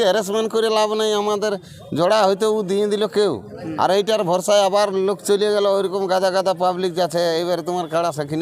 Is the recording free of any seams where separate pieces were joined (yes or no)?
yes